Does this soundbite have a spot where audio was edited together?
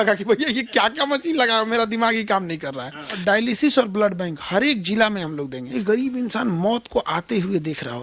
yes; 2 cuts; at 3.1 s, 5.6 s

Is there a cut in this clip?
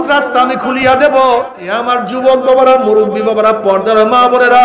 yes; 1 cut; at 1.5 s

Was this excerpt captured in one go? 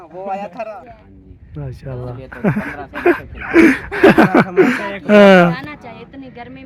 yes; 0 cuts

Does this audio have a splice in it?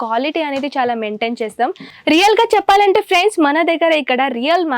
yes; 1 cut; at 1.9 s

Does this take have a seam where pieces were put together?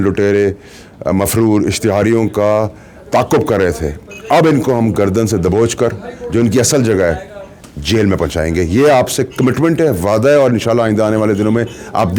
no; 0 cuts

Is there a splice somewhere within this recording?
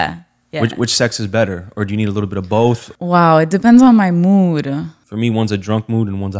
yes; 2 cuts; at 2.9 s, 5.0 s

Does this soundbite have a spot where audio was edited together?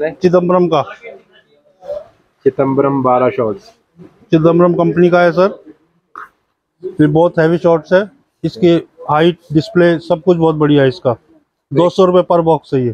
no; 0 cuts

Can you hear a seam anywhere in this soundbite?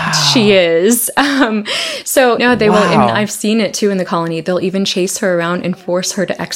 yes; 1 cut; at 2.4 s

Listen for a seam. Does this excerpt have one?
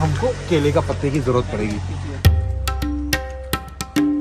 yes; 1 cut; at 2.0 s

